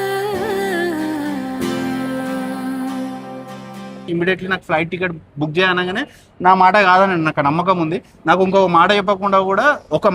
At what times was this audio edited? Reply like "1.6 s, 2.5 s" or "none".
4.1 s